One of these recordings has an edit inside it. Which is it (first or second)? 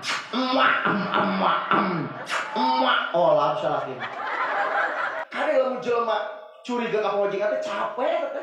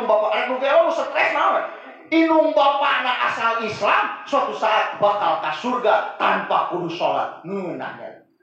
first